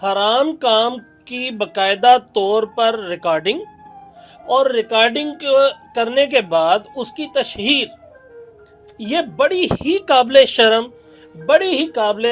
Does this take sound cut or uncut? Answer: uncut